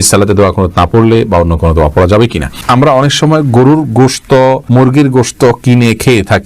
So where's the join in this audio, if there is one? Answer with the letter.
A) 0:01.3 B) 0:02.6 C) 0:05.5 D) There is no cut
B